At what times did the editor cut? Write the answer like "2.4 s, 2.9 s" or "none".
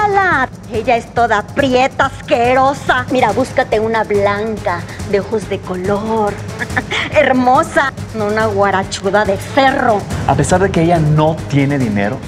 10.1 s